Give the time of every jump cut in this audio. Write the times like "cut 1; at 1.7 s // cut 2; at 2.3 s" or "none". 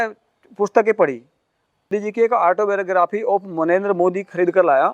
cut 1; at 1.9 s